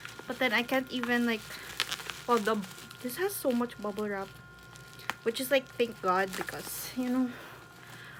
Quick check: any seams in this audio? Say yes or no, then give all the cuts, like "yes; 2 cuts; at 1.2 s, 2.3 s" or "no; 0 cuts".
no; 0 cuts